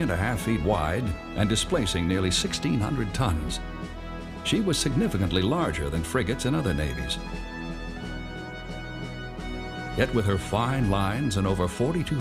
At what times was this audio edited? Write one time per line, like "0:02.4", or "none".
0:05.5